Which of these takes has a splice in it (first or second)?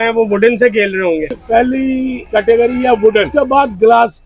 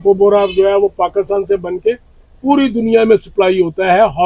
first